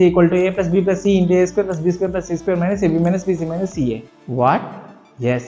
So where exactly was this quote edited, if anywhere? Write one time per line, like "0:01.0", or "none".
0:04.1